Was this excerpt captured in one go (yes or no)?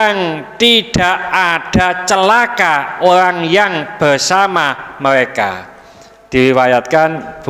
yes